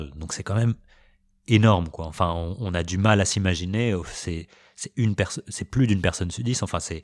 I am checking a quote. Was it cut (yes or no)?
no